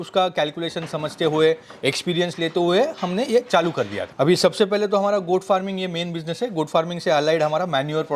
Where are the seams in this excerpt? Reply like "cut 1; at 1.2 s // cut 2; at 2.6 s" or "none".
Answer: cut 1; at 4.0 s